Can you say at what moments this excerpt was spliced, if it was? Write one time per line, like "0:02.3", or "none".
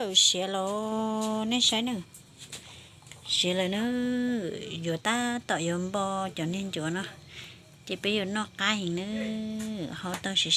none